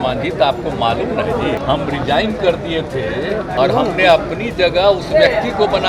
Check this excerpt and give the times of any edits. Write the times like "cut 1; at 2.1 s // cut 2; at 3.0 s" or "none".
cut 1; at 1.6 s // cut 2; at 3.5 s